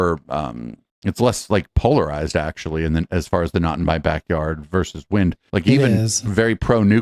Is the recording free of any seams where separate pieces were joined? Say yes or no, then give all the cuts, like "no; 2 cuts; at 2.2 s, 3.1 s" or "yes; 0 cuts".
yes; 0 cuts